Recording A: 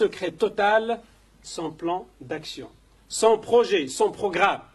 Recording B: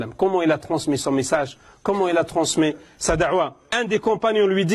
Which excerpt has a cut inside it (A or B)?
B